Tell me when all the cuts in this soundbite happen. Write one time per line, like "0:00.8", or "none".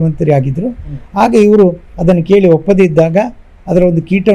0:01.9

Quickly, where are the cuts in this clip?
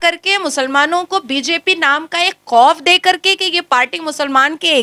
none

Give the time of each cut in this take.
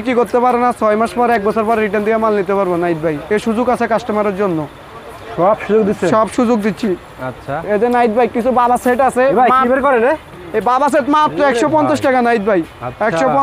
none

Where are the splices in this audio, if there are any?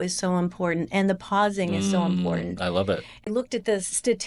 0:03.3

